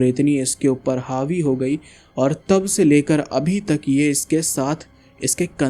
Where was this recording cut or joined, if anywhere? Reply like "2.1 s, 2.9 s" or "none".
none